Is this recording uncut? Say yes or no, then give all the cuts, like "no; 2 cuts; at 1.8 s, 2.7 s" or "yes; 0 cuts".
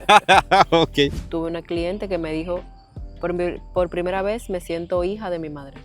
no; 1 cut; at 1.2 s